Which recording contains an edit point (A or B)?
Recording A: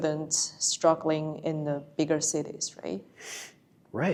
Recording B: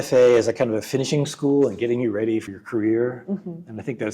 B